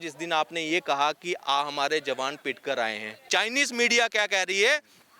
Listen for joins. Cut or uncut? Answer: cut